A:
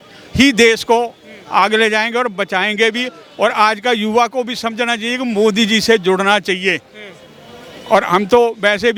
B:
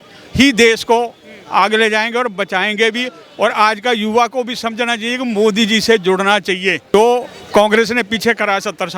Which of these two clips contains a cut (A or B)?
B